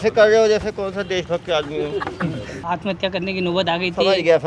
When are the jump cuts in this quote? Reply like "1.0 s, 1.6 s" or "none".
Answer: 2.6 s

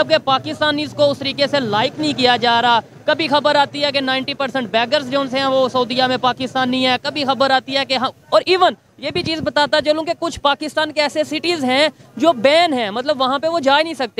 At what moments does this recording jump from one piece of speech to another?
none

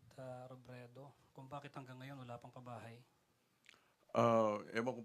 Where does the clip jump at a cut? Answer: 3.8 s

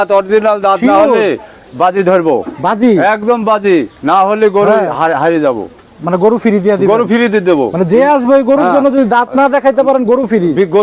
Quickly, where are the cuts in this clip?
none

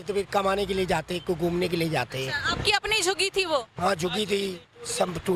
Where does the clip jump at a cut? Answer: none

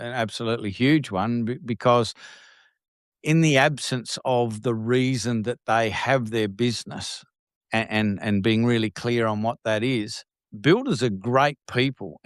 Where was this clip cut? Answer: none

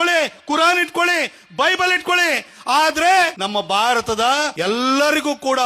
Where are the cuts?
3.4 s, 4.5 s

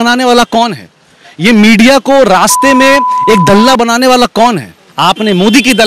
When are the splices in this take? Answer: 4.9 s

